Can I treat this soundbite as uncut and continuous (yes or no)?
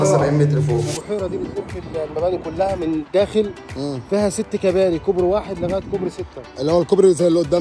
no